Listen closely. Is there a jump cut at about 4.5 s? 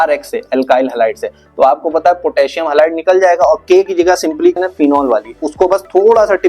yes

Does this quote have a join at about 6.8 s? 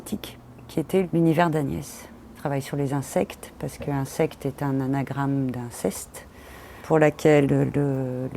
yes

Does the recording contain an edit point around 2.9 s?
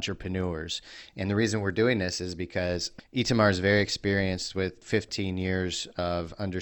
yes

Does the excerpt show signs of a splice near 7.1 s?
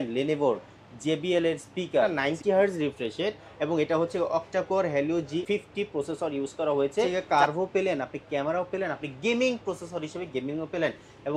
yes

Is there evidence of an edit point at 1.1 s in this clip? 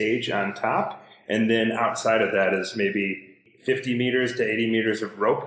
no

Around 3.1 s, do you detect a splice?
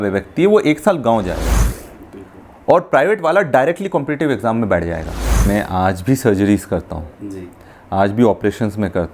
no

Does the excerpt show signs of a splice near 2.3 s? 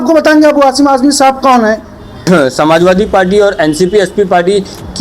yes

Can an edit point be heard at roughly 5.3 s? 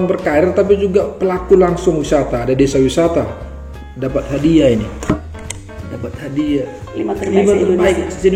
no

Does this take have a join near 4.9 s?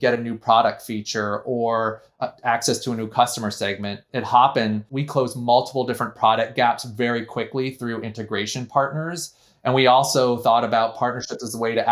yes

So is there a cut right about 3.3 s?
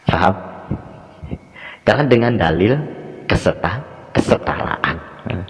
no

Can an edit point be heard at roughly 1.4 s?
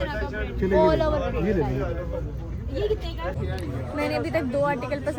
no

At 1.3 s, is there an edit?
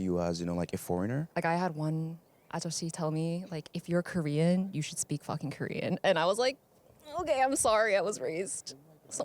yes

